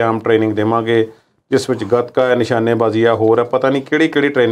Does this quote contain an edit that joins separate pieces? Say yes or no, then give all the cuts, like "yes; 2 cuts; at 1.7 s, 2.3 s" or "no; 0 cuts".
no; 0 cuts